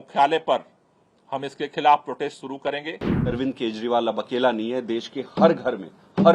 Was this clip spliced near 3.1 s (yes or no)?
yes